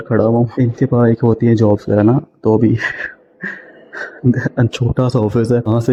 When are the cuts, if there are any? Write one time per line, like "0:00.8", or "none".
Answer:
none